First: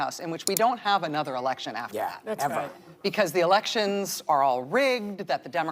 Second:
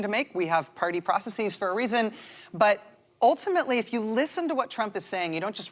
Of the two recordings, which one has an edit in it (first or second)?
first